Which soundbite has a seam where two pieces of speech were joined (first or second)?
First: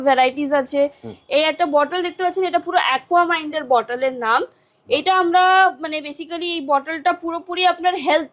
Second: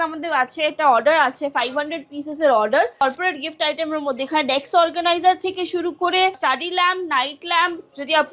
second